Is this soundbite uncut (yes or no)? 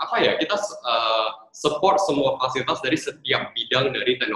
yes